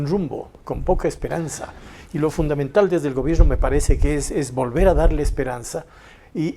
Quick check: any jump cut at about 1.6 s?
no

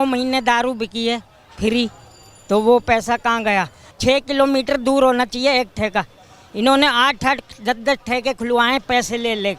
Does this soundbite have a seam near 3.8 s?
yes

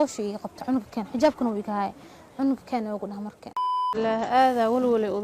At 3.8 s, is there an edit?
yes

